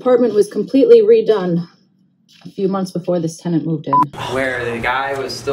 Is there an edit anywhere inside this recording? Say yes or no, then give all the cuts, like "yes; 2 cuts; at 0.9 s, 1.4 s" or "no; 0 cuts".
yes; 1 cut; at 4.2 s